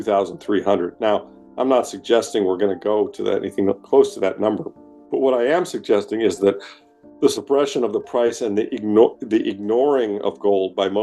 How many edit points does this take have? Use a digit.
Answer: 0